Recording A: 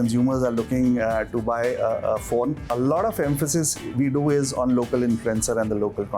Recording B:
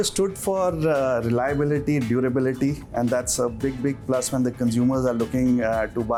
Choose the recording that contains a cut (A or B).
A